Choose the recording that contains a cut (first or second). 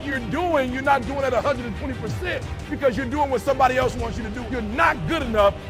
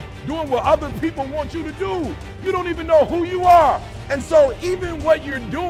first